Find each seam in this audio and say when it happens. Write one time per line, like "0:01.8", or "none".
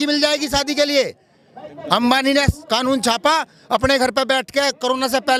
none